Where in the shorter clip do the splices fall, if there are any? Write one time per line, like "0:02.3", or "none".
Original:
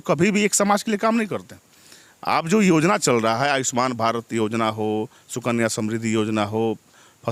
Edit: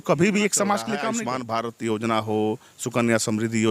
0:01.3